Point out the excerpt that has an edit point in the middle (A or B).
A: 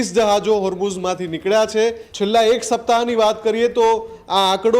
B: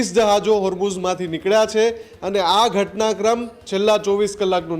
A